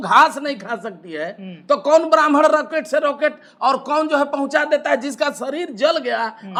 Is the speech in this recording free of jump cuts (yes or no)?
yes